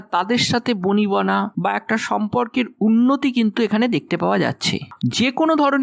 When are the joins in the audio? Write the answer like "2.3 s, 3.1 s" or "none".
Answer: 4.9 s